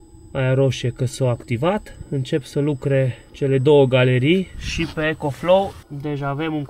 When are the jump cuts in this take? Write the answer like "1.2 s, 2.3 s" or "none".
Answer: 2.0 s, 3.2 s, 4.6 s, 5.8 s